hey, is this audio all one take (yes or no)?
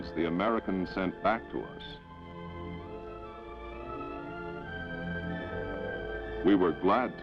yes